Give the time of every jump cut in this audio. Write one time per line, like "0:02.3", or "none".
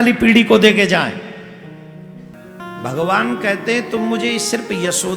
0:02.3